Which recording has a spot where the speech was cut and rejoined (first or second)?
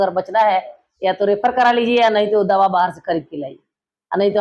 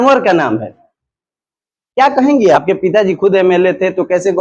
second